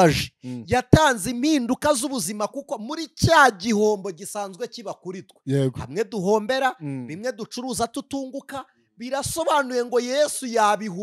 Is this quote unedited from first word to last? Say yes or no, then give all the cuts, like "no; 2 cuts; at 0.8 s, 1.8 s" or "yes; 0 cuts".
yes; 0 cuts